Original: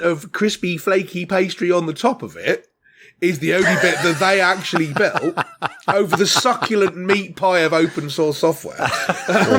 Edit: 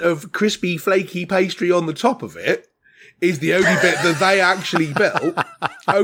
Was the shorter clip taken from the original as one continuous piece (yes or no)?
yes